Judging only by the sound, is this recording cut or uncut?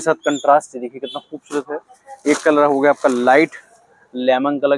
uncut